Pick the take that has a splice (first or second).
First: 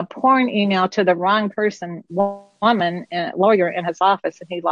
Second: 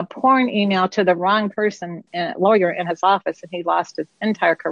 second